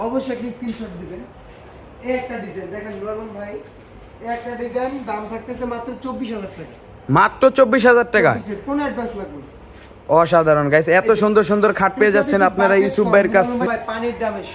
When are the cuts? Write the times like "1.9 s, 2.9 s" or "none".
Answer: 13.7 s